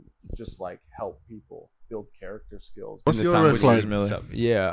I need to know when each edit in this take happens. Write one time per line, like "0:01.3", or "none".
0:03.1